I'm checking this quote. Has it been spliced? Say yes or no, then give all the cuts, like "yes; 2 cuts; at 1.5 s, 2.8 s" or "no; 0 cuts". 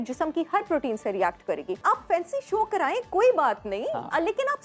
yes; 1 cut; at 1.8 s